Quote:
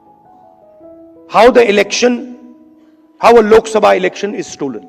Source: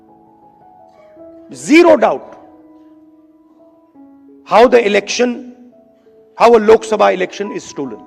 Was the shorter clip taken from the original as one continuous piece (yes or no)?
no